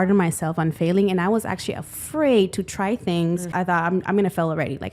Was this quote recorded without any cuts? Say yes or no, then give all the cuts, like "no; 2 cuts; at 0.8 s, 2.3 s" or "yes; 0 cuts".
no; 1 cut; at 3.5 s